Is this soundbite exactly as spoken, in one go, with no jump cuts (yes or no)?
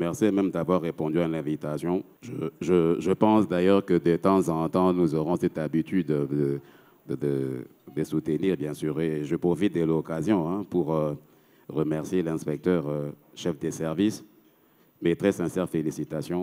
no